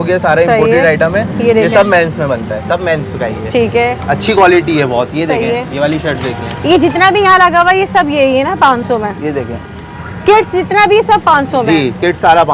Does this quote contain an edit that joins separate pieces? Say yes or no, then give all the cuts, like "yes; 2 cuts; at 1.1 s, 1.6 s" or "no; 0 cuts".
no; 0 cuts